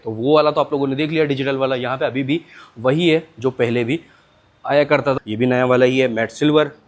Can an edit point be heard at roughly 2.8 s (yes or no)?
no